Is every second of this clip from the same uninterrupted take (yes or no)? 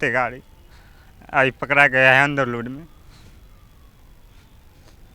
yes